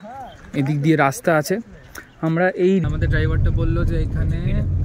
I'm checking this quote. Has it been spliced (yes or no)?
yes